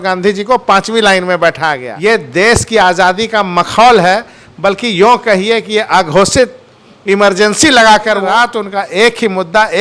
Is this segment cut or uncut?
cut